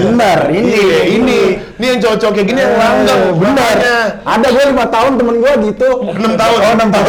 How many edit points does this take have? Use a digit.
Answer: 0